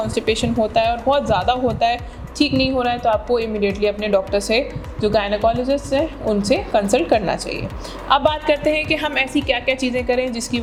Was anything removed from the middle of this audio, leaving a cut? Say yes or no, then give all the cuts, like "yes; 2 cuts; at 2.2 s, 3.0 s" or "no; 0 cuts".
no; 0 cuts